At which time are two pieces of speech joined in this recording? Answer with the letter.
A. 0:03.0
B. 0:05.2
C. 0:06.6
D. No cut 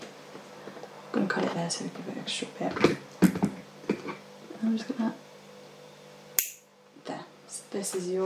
D